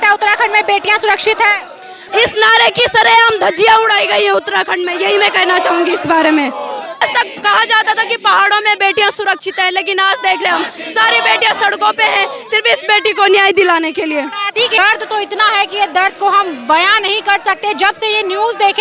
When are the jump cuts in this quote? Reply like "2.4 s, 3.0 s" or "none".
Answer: 2.0 s, 7.0 s, 14.8 s